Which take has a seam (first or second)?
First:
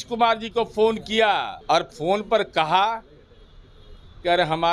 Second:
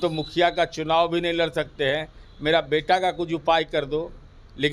first